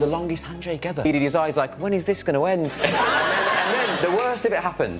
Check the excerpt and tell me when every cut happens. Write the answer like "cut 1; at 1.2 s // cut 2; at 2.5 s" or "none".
cut 1; at 1.0 s